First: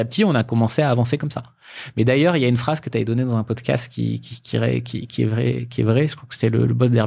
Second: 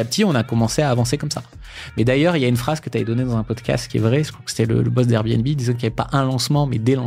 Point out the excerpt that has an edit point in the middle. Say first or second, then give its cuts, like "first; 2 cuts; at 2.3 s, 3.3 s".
second; 1 cut; at 3.9 s